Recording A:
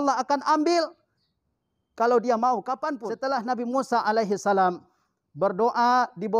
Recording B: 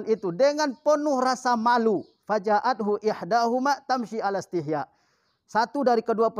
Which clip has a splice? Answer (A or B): A